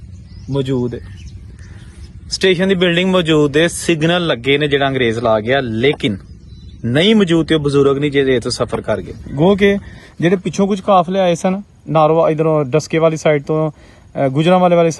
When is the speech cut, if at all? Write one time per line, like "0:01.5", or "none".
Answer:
0:09.2